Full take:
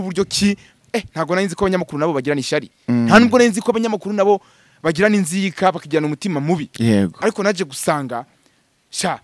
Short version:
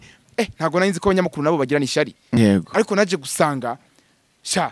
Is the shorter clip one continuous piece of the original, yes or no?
no